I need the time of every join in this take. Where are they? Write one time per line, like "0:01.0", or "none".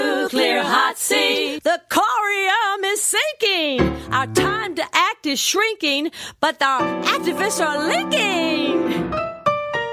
none